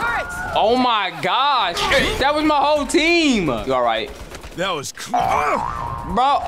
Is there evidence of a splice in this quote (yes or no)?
yes